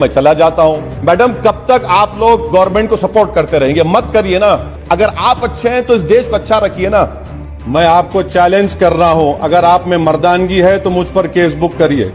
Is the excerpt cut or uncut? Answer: cut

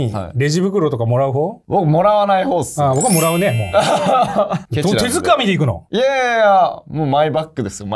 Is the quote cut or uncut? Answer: uncut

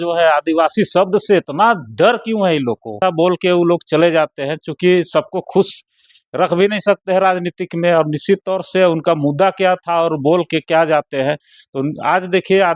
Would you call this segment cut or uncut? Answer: cut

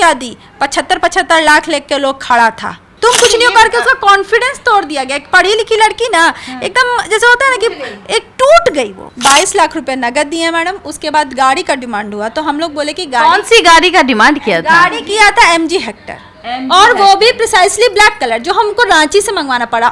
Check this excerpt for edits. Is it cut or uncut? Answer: cut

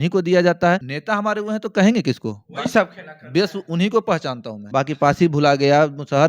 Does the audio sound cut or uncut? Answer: cut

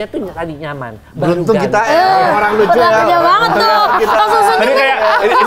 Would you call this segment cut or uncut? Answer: uncut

